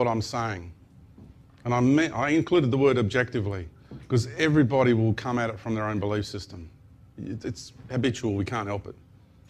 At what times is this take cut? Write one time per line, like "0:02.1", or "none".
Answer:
none